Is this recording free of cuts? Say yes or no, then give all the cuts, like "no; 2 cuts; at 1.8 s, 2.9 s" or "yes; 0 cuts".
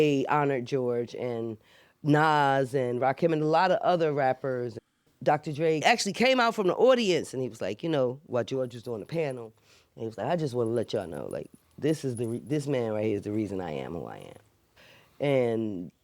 no; 2 cuts; at 4.8 s, 5.8 s